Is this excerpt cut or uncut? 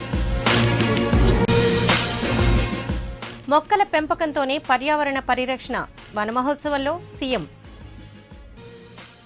cut